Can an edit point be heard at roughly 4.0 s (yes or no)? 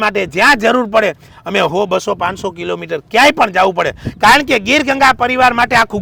no